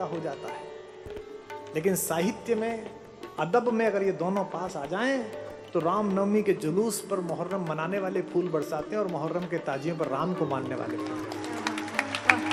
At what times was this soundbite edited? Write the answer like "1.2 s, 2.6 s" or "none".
none